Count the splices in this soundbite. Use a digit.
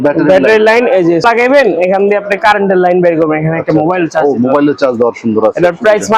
1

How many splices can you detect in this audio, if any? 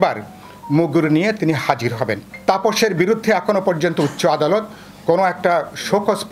1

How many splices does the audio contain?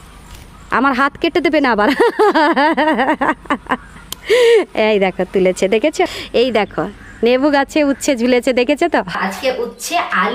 2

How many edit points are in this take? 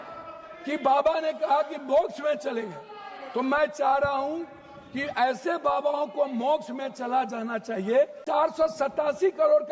1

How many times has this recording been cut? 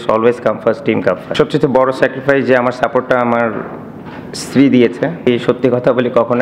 2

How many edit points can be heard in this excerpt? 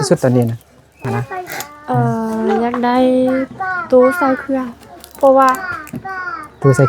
1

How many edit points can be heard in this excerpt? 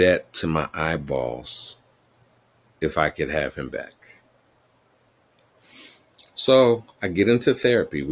0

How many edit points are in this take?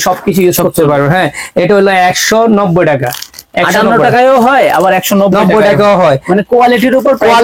0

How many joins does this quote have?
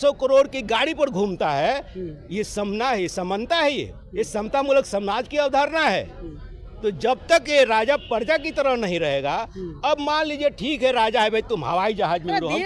0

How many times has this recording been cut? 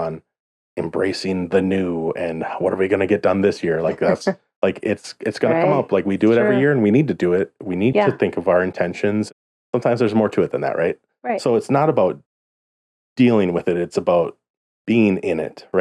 1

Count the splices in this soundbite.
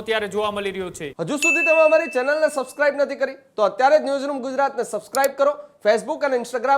1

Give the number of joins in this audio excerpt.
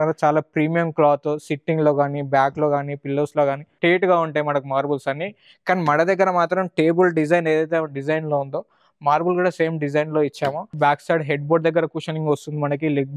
2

